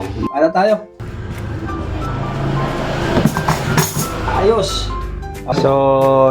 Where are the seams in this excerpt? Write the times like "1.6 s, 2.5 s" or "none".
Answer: 1.0 s